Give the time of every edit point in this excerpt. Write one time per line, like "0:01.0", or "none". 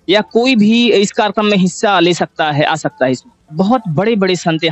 0:03.4